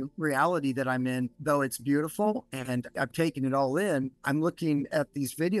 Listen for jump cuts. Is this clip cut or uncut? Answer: uncut